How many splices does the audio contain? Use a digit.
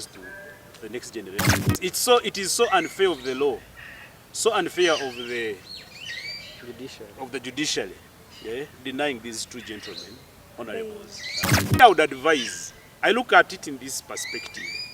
2